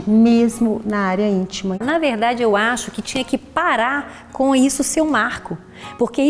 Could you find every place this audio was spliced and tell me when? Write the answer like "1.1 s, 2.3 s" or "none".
1.8 s

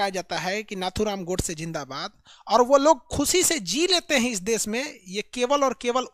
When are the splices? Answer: none

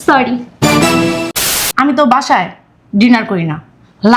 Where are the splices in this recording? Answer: 1.4 s

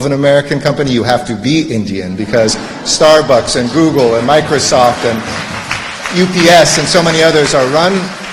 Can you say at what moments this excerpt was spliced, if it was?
none

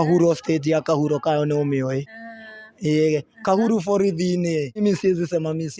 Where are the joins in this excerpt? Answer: 4.8 s

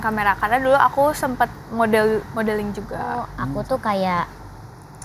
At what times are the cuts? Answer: 3.3 s

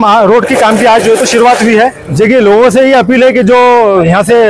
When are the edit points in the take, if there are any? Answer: 2.0 s

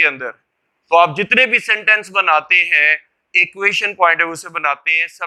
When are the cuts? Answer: none

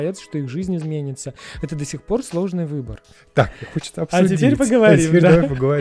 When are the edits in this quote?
3.2 s

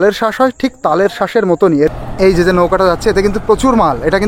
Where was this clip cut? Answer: 1.6 s

